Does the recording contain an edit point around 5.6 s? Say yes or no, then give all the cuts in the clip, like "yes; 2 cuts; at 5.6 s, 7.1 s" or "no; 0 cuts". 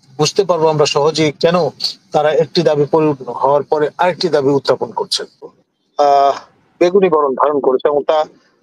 yes; 1 cut; at 5.6 s